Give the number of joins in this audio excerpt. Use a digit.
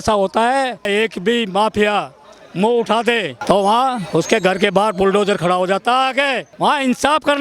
3